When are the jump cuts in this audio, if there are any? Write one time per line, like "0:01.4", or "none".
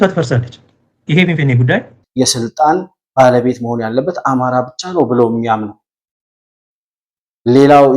0:02.0